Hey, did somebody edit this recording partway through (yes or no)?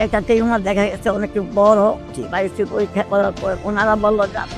yes